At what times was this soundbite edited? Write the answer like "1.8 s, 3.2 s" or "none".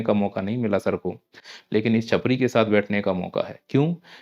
none